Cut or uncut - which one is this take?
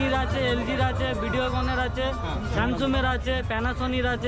uncut